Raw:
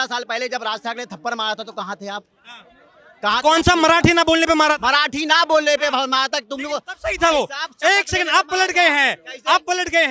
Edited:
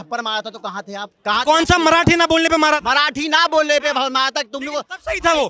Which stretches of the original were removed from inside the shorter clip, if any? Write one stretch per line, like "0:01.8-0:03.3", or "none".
0:02.3-0:03.1